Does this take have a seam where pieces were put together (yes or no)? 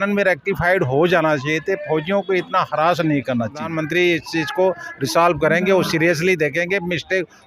yes